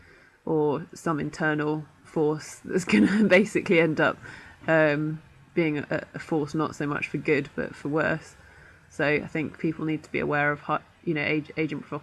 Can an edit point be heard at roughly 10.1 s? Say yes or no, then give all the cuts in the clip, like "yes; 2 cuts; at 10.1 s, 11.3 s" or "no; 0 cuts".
no; 1 cut; at 4.3 s